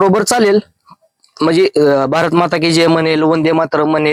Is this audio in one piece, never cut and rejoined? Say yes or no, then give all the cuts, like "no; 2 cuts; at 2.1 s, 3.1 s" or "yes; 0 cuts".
yes; 0 cuts